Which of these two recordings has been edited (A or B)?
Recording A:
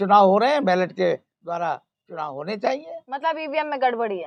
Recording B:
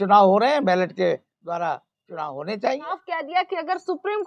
B